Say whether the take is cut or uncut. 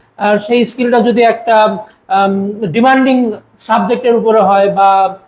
uncut